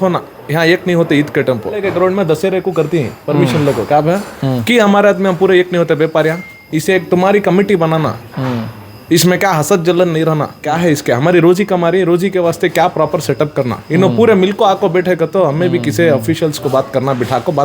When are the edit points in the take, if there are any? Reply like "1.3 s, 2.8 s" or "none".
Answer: 1.8 s, 6.6 s, 10.7 s